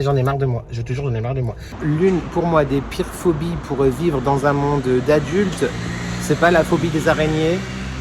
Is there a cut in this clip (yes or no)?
yes